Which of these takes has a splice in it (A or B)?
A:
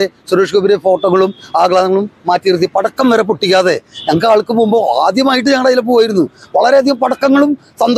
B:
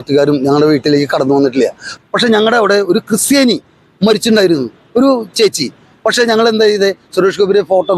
B